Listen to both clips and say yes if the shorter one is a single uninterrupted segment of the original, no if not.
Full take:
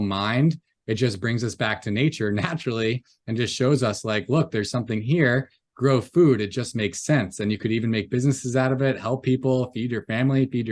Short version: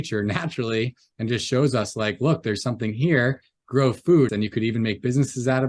no